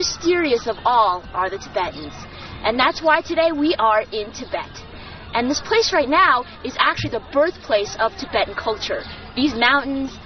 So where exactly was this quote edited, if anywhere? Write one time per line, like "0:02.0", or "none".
none